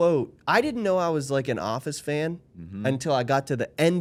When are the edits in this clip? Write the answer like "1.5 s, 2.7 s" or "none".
none